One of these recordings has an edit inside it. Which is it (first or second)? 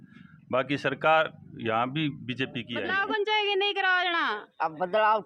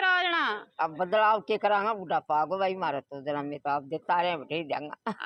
first